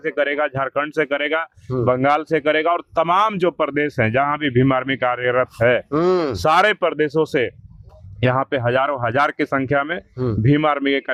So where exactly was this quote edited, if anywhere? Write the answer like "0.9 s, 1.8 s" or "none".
none